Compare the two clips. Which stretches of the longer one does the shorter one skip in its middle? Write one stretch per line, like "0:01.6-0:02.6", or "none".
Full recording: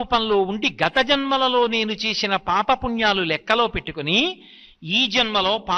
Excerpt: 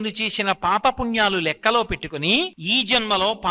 0:04.4-0:04.8